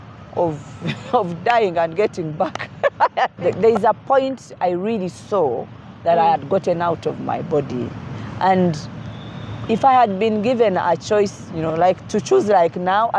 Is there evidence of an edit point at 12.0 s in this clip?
no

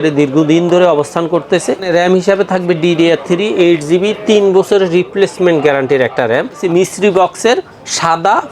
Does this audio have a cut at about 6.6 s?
yes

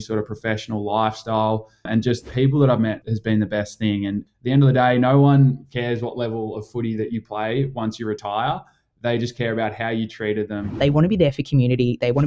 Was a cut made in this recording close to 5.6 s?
no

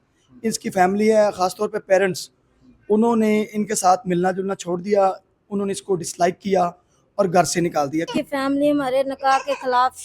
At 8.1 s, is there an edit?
yes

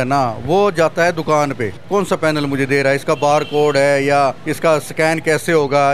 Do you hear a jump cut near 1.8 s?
yes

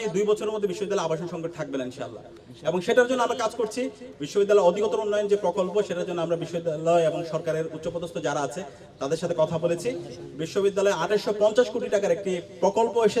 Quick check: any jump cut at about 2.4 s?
no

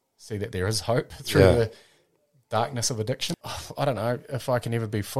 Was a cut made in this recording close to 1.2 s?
no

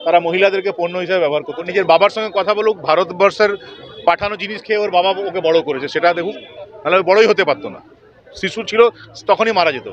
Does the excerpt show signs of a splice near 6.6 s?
no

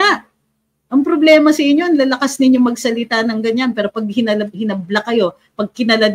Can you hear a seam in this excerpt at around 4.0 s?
no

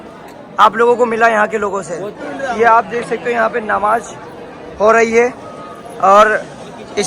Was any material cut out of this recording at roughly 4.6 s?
no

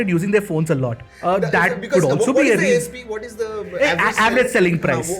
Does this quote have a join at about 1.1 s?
yes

